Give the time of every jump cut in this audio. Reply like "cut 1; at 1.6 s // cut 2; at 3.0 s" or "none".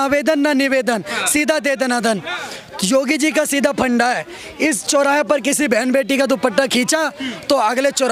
none